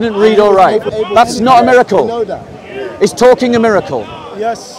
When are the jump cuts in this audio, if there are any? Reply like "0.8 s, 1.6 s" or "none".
0.9 s